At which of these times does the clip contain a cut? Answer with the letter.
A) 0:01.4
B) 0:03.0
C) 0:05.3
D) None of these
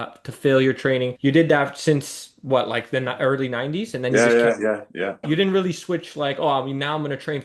C